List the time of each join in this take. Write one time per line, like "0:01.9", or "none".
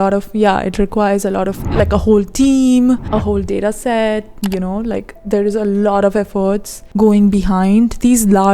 0:03.0
0:04.3
0:06.8